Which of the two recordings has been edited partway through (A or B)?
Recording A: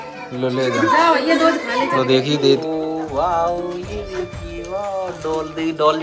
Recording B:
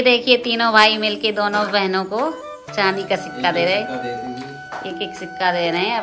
A